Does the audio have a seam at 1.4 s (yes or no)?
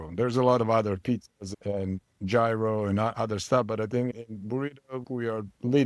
no